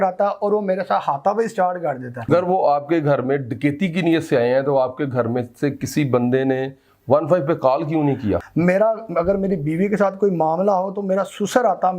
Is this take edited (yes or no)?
yes